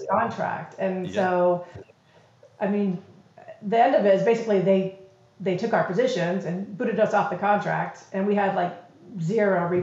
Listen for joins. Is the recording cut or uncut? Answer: uncut